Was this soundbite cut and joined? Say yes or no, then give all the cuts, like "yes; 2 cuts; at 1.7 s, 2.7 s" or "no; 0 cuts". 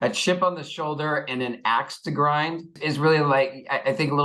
yes; 1 cut; at 2.7 s